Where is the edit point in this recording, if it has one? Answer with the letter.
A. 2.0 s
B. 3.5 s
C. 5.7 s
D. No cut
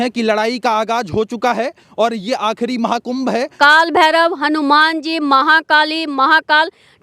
B